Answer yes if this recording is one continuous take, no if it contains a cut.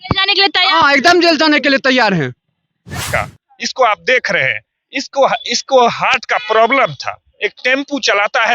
no